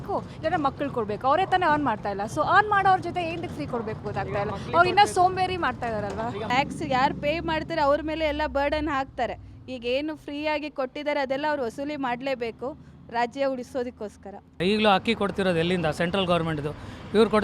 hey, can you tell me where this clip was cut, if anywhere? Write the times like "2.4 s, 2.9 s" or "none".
6.5 s, 14.6 s